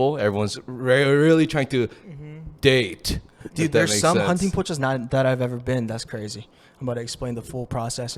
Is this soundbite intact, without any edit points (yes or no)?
yes